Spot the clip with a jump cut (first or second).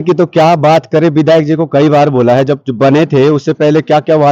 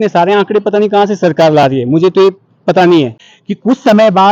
second